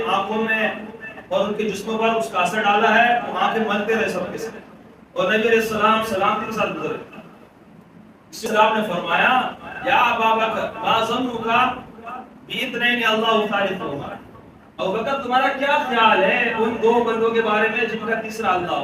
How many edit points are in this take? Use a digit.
1